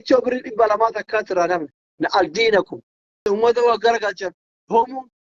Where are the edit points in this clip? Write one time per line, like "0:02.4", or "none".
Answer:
0:03.2